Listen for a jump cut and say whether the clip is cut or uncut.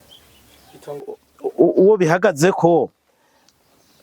cut